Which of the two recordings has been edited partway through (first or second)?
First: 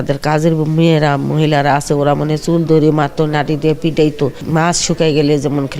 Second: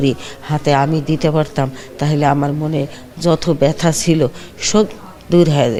first